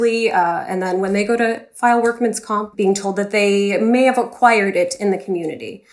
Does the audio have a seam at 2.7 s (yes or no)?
yes